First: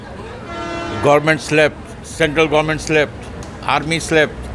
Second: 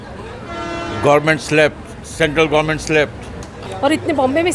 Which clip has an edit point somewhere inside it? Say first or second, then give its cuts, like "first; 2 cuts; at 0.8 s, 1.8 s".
second; 1 cut; at 3.6 s